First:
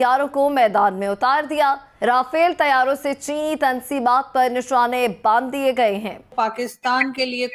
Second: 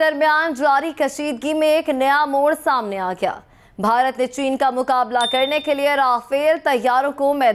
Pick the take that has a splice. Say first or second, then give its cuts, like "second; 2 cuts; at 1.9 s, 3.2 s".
first; 2 cuts; at 1.9 s, 6.3 s